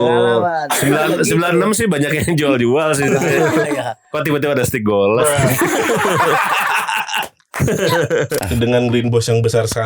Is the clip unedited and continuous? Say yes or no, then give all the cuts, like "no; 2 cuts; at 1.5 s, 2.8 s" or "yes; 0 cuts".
no; 1 cut; at 8.4 s